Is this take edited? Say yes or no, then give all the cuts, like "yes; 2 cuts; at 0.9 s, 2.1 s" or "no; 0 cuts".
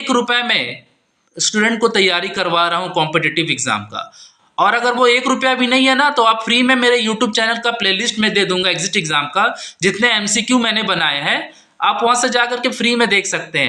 no; 0 cuts